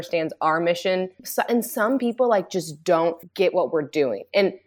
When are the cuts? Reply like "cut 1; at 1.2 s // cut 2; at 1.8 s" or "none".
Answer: cut 1; at 1.3 s // cut 2; at 3.2 s

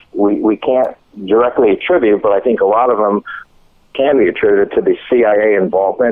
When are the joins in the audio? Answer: none

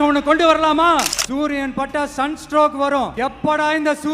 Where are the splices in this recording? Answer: cut 1; at 1.2 s // cut 2; at 3.1 s

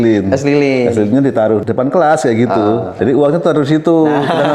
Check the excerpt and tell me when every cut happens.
cut 1; at 1.6 s // cut 2; at 2.9 s

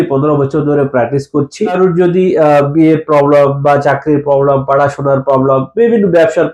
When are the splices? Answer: cut 1; at 1.7 s

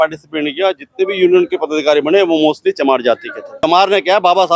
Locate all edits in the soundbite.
cut 1; at 3.6 s

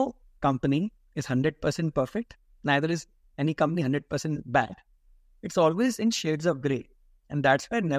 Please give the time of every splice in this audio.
none

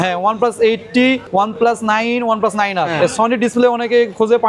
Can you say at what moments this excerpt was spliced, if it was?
cut 1; at 1.2 s // cut 2; at 2.9 s

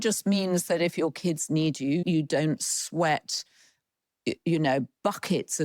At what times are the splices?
cut 1; at 2.0 s

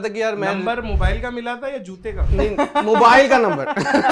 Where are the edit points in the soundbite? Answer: none

